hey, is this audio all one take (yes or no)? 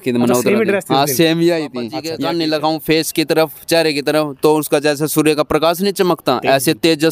no